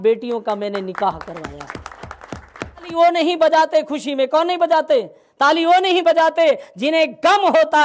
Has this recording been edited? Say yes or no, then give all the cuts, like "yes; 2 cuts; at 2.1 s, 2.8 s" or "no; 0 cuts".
yes; 1 cut; at 2.9 s